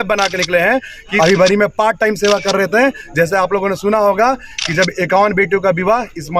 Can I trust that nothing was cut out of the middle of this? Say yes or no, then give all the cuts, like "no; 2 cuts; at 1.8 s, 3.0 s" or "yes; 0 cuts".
no; 1 cut; at 1.1 s